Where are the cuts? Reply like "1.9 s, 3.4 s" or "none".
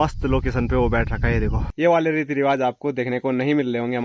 1.6 s